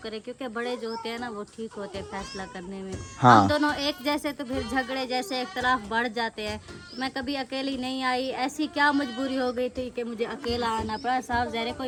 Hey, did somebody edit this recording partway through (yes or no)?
no